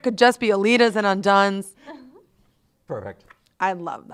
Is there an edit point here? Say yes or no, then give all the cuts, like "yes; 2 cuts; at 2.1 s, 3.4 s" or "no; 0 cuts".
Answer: no; 0 cuts